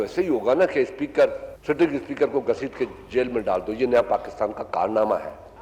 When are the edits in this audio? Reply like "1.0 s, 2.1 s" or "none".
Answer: none